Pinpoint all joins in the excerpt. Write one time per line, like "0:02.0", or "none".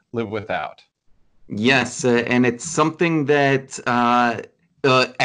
none